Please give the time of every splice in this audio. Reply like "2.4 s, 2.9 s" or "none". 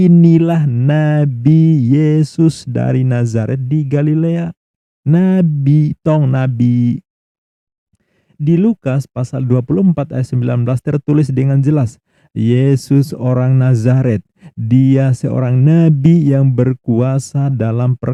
none